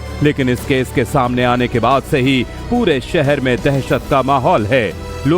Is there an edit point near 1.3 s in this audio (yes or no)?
yes